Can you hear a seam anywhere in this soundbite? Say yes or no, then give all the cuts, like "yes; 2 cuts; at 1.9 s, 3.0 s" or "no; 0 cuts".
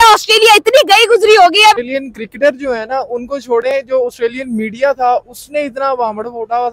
yes; 1 cut; at 1.8 s